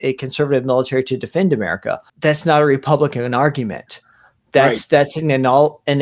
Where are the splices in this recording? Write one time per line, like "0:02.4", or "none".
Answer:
0:02.0